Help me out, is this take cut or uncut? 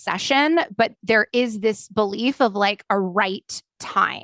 uncut